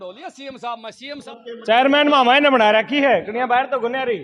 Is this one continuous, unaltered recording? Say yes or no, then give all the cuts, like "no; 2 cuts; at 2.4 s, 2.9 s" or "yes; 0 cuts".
no; 1 cut; at 1.2 s